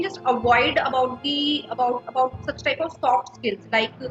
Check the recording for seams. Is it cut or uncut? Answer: uncut